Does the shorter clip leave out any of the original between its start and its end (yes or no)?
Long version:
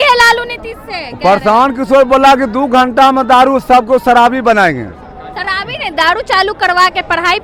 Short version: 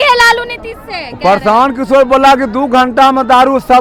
no